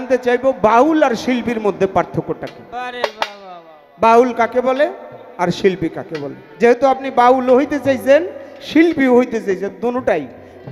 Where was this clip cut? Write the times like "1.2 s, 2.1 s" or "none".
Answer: none